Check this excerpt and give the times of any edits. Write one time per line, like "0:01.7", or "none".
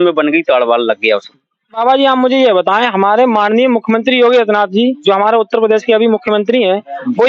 0:01.8